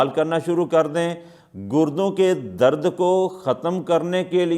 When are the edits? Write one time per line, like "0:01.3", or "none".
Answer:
none